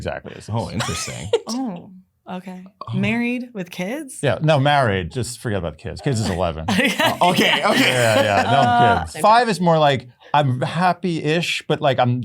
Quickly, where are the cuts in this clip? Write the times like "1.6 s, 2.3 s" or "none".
9.1 s